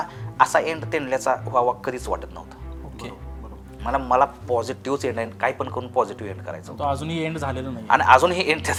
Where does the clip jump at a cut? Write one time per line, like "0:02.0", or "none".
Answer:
none